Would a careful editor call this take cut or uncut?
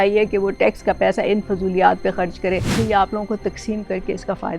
cut